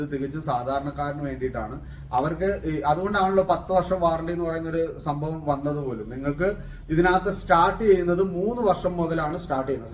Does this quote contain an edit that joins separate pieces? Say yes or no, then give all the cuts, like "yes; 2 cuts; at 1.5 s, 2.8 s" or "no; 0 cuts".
no; 0 cuts